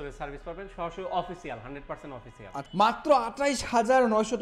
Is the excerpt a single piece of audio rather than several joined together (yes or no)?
no